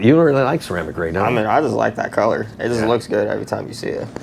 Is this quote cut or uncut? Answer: uncut